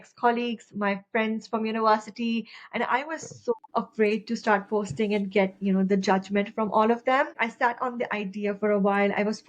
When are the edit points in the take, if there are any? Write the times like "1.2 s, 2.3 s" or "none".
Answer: 3.6 s, 7.3 s